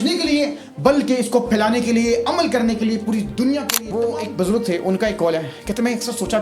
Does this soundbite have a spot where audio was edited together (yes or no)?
yes